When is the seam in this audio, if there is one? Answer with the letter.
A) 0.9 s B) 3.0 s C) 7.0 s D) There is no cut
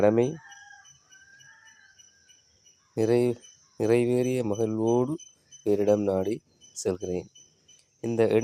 D